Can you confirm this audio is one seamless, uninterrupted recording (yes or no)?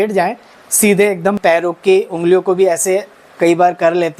no